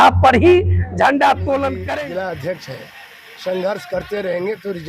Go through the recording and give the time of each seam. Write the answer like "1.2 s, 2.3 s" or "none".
1.8 s